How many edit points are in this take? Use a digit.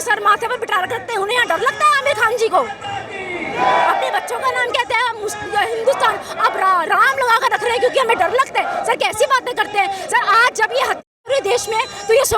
0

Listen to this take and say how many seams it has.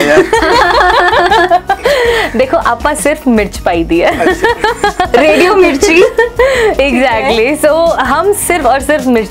0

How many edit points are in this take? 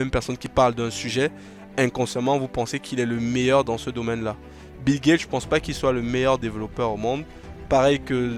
0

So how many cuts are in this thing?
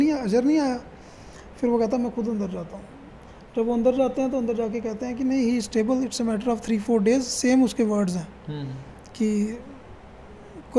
0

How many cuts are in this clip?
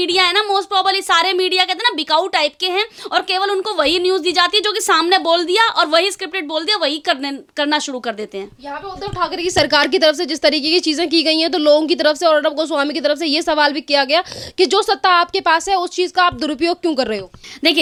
0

